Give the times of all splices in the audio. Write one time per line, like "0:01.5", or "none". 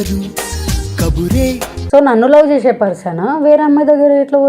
0:01.7